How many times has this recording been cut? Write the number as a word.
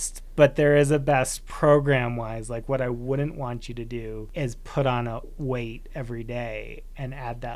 two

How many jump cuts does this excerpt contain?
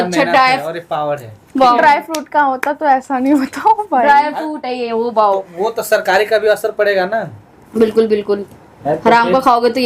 zero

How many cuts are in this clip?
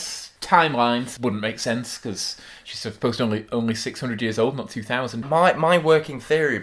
two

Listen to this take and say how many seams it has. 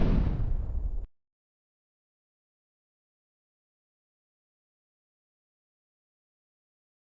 zero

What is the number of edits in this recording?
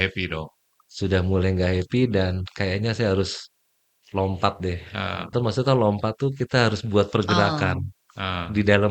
one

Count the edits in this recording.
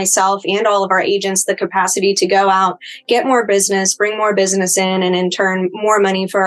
zero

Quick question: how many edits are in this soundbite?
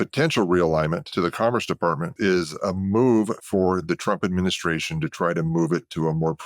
two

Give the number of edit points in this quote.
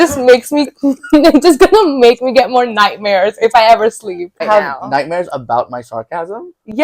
one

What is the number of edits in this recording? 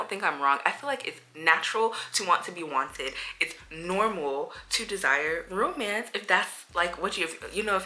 zero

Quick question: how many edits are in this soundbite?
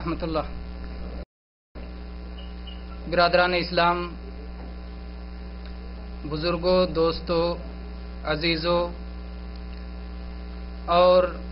one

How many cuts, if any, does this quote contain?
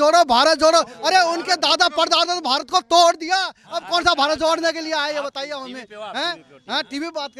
zero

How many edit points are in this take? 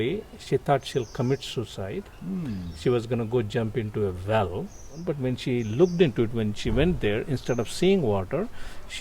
one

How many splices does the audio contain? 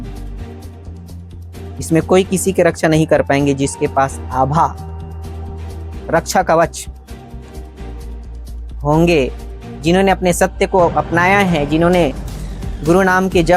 two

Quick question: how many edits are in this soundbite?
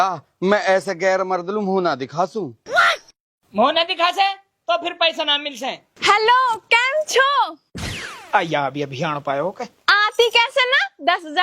one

